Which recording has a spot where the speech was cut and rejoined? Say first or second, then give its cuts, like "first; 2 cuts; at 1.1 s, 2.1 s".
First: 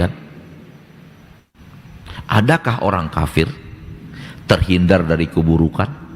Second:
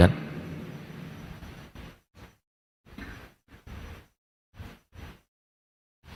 first; 1 cut; at 1.4 s